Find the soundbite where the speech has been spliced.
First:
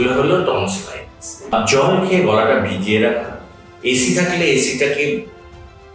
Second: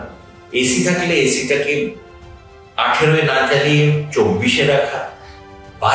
first; 1 cut; at 1.5 s

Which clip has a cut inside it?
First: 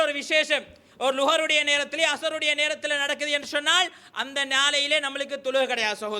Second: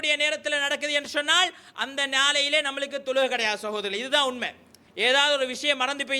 second; 1 cut; at 4.8 s

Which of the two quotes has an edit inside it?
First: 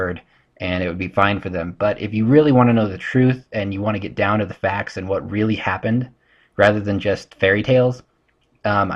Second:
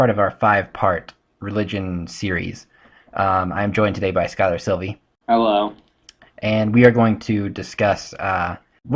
first; 1 cut; at 4.1 s

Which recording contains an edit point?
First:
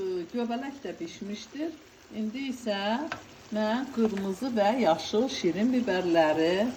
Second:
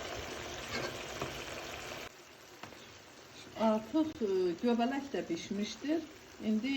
second; 1 cut; at 2.1 s

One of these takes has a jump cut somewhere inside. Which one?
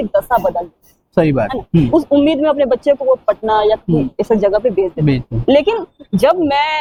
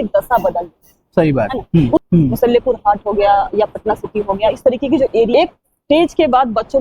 second; 2 cuts; at 2.0 s, 5.3 s

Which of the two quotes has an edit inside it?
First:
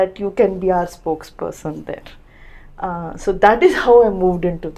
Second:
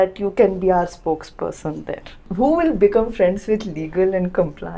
second; 1 cut; at 2.3 s

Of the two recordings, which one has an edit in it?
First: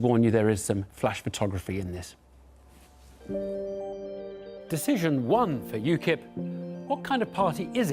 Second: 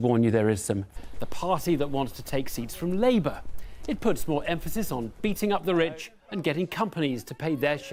first; 1 cut; at 1.0 s

